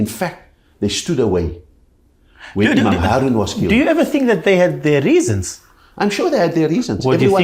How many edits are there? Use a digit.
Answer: 0